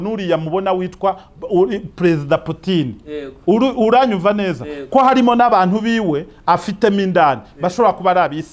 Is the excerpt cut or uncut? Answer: uncut